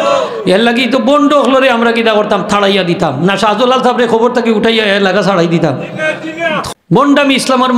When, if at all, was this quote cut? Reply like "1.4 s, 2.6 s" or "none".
6.7 s